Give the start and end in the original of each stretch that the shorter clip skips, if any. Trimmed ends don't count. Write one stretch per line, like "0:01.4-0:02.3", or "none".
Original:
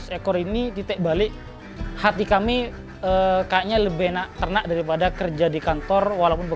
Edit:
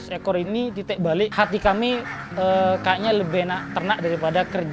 0:01.3-0:02.0